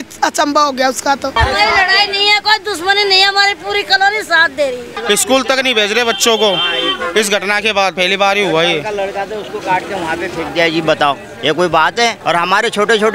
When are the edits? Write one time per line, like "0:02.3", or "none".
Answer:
0:01.3
0:04.9
0:08.0
0:12.2

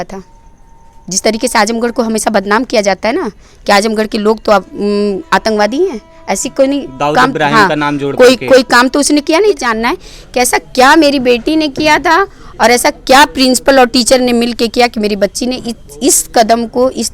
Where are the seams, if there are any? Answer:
0:09.7

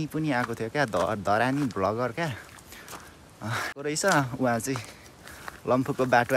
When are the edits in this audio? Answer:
0:03.8

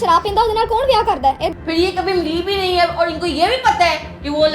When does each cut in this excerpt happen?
0:01.4

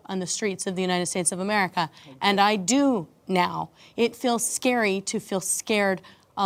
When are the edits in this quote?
none

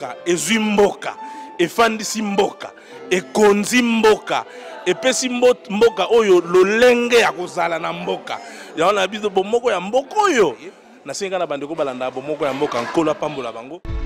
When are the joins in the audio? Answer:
none

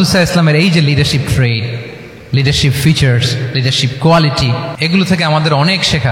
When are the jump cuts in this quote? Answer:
0:04.8

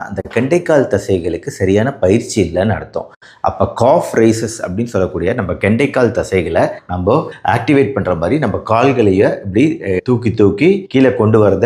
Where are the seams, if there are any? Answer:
none

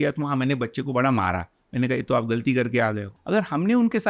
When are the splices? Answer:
0:03.1

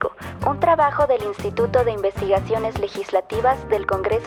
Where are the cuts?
none

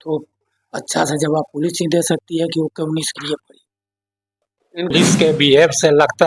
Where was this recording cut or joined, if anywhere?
0:04.9

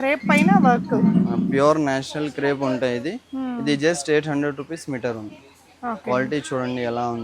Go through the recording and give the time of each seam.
none

